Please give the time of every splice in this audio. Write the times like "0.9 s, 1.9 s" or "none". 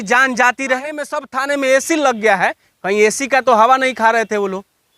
1.3 s